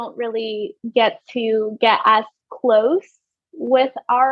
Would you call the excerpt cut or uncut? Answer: uncut